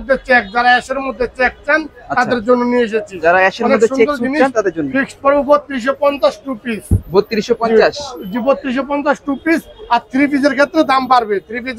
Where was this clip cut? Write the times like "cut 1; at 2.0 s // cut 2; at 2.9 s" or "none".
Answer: none

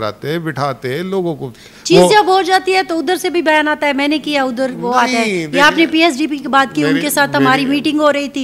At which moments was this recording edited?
none

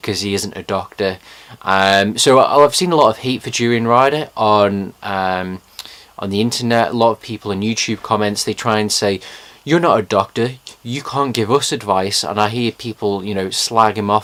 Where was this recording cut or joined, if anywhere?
none

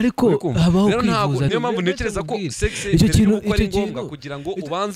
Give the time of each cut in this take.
cut 1; at 1.5 s

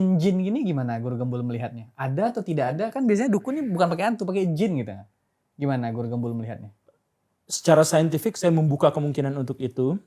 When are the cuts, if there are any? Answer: none

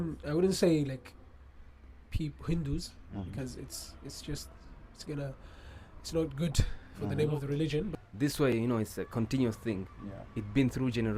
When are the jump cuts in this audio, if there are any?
cut 1; at 7.9 s

